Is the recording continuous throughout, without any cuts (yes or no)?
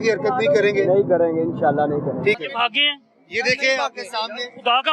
no